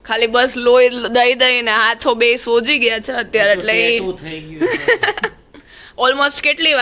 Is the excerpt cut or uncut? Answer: uncut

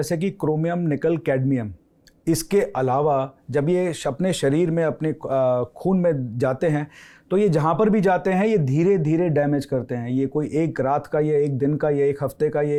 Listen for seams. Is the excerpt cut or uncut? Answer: uncut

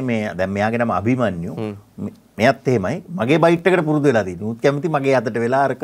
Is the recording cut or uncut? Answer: uncut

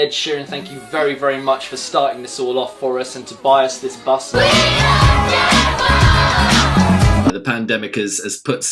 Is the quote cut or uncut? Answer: cut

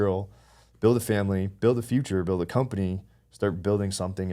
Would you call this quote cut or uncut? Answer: uncut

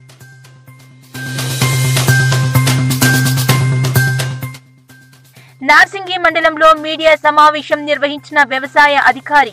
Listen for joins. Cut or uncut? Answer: cut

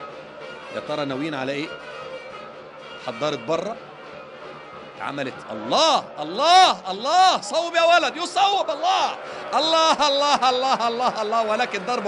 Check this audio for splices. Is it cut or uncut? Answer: cut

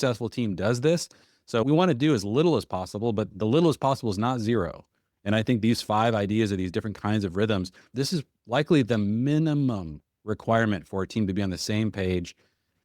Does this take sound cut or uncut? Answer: cut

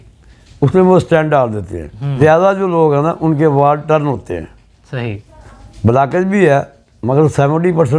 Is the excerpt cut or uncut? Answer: cut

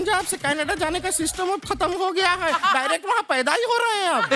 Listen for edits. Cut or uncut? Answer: uncut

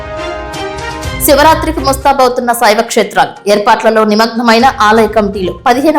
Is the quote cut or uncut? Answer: cut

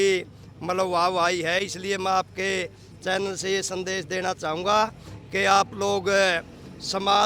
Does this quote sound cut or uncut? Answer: uncut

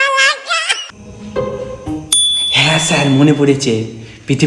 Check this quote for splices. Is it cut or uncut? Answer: cut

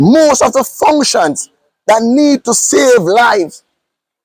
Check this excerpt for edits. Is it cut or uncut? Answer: uncut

